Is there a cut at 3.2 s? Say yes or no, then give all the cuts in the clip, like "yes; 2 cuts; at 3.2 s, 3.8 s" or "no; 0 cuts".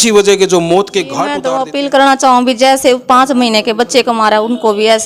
no; 1 cut; at 1.3 s